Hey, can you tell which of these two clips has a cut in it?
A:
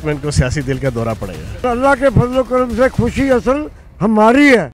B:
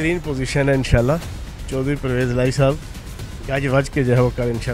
A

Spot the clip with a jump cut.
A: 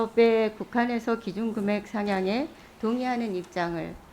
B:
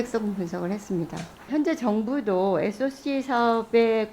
B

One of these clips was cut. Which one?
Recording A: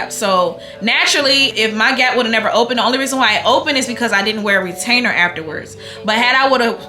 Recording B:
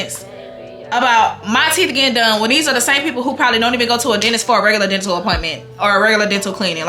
A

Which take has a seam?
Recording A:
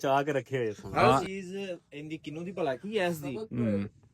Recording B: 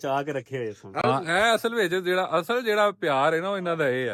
A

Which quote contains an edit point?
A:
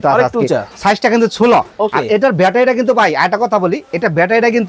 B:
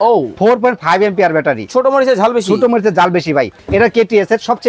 B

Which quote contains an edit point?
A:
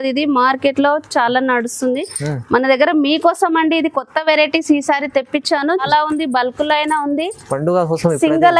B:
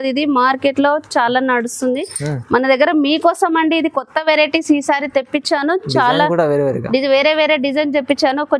A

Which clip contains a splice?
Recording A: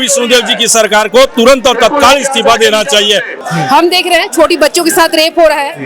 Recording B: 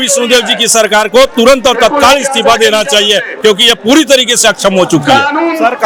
A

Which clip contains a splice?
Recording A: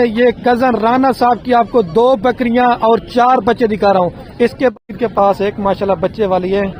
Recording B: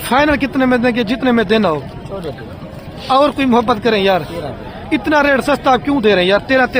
A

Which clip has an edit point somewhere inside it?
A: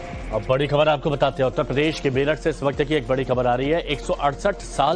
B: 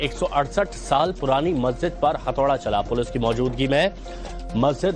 B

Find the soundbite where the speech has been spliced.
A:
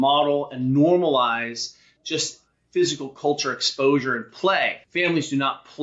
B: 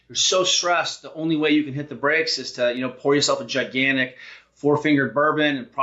A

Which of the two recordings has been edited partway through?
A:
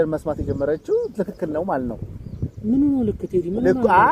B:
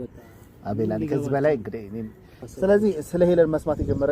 B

